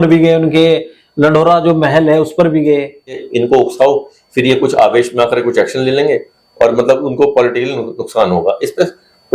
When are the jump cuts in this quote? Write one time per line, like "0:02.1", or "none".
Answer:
0:03.3